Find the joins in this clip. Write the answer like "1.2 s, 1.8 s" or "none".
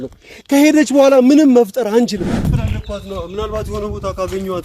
2.4 s